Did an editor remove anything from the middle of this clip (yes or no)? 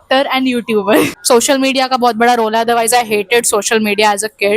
yes